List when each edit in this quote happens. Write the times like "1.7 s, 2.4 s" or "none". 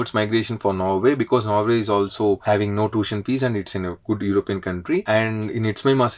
none